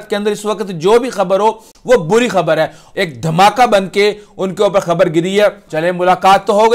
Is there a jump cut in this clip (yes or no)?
yes